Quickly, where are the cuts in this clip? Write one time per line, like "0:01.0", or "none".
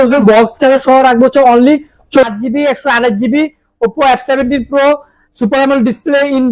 0:02.2